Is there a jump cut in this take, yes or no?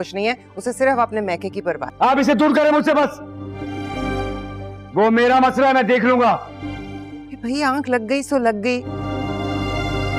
no